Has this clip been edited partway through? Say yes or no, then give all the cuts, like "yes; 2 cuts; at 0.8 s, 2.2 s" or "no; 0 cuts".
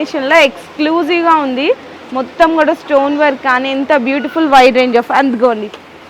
no; 0 cuts